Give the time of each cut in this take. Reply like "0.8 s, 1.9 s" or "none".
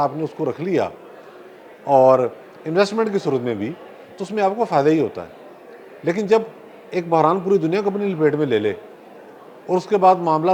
none